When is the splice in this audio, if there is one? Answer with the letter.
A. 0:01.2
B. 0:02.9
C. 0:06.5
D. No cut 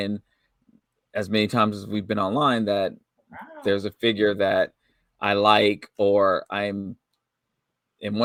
D